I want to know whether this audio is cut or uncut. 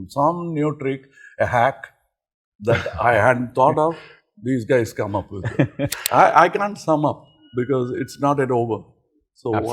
cut